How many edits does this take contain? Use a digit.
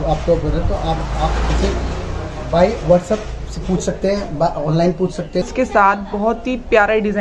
1